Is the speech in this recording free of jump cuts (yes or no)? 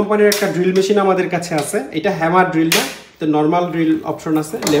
yes